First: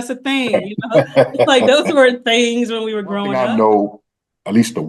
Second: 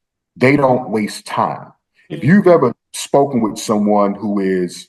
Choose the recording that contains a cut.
first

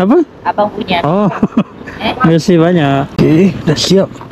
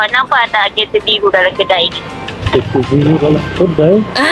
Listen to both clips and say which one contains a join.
first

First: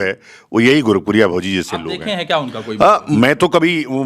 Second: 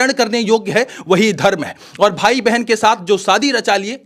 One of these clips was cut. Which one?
first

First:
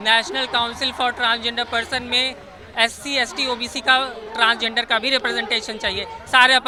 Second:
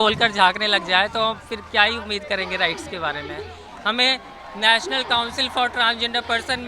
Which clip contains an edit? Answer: second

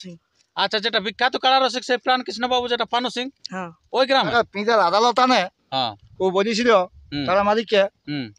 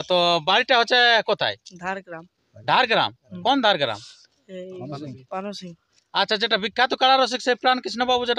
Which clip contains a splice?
first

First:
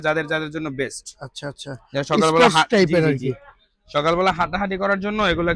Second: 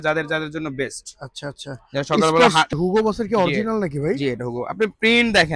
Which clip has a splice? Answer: second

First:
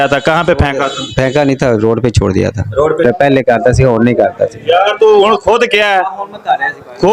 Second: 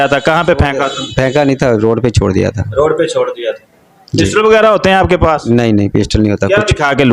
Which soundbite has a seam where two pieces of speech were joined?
first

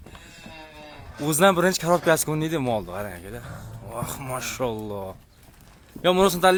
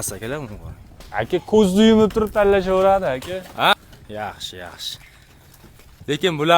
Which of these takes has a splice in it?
second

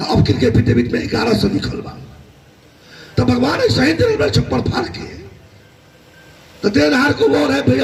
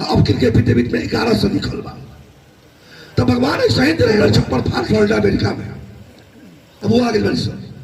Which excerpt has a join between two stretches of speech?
second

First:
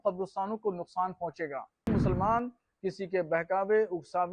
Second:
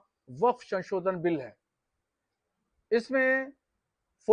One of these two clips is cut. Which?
first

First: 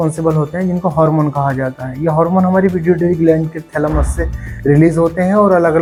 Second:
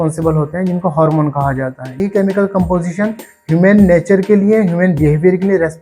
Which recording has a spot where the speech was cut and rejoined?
second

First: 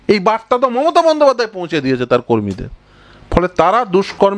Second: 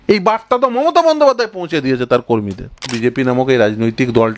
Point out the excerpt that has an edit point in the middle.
second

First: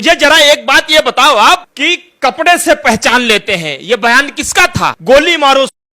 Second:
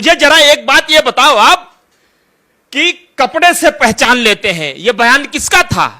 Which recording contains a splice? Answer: first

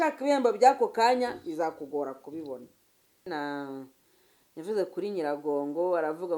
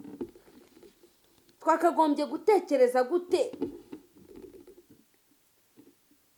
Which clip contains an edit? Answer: first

